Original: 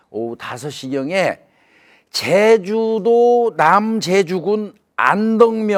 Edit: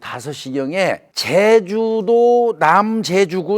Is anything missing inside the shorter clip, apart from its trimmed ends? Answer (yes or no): yes